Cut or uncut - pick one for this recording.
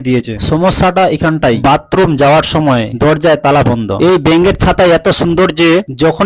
cut